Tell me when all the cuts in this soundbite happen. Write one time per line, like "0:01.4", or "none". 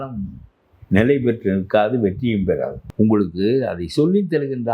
0:02.8